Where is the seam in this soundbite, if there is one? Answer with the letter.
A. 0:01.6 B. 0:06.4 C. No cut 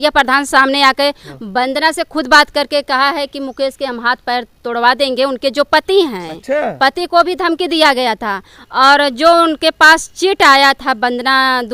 C